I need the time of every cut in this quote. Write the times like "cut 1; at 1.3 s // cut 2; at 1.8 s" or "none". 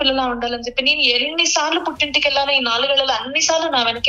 none